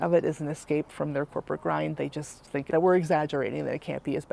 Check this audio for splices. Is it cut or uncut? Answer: uncut